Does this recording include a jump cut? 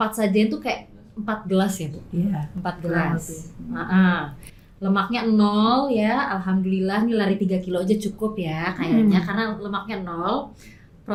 no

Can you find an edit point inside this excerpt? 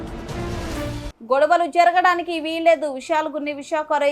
yes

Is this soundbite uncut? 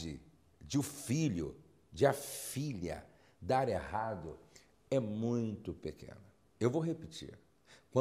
no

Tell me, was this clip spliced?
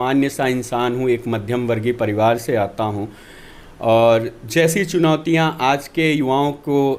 no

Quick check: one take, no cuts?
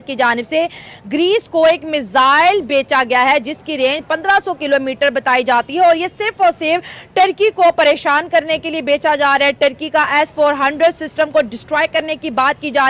yes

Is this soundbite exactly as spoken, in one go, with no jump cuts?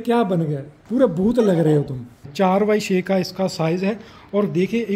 no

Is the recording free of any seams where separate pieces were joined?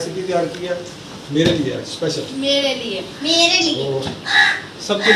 yes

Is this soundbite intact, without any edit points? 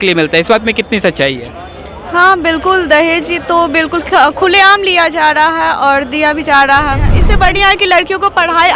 no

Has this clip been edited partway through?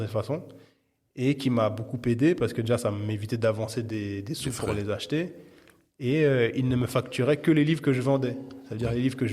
no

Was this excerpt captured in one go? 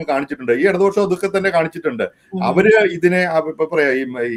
yes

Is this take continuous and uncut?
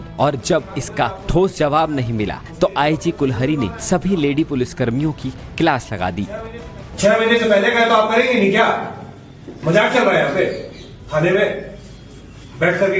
no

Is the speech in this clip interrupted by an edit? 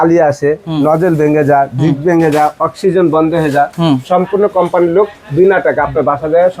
no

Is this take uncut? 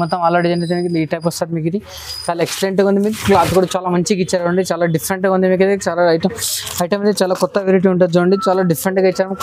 yes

